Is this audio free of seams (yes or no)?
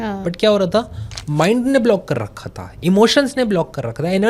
yes